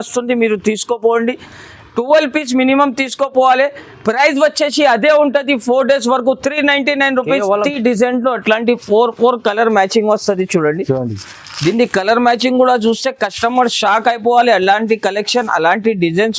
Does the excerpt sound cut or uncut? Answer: cut